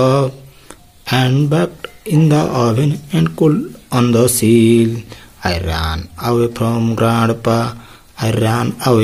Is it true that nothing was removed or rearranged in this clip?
yes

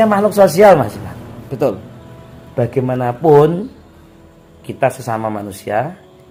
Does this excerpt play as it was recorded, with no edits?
yes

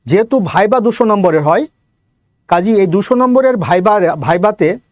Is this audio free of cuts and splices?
yes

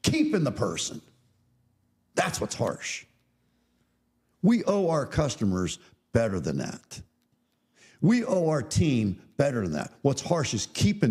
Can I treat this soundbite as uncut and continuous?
yes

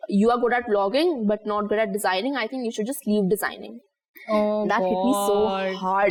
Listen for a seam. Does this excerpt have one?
no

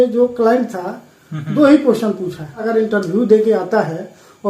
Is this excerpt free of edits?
no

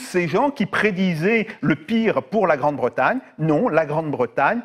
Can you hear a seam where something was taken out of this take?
no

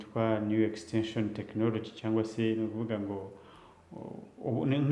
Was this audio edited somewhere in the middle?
no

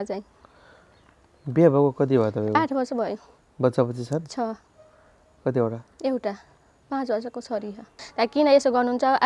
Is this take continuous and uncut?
no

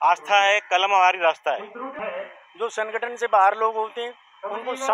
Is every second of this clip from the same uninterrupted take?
no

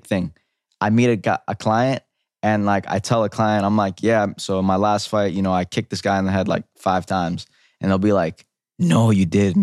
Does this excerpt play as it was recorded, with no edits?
yes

